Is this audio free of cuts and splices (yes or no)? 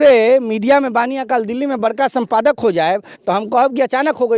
yes